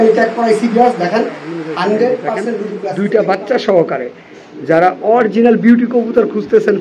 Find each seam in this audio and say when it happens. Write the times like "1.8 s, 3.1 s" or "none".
3.0 s